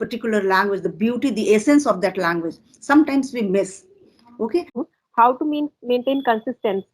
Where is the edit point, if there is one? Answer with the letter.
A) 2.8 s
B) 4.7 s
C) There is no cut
B